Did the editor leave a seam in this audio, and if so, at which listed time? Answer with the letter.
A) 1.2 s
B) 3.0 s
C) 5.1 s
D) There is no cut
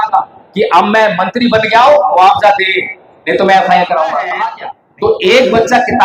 C